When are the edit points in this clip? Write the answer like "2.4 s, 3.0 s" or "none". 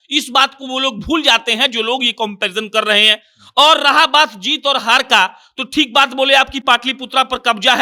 none